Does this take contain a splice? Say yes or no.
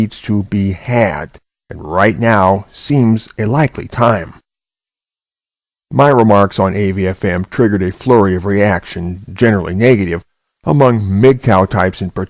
yes